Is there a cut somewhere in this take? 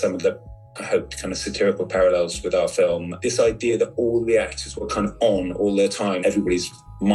yes; 2 cuts; at 3.1 s, 6.2 s

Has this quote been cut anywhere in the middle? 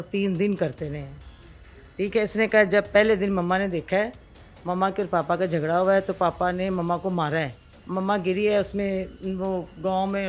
no; 0 cuts

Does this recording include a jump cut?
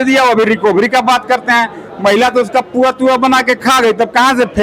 no; 0 cuts

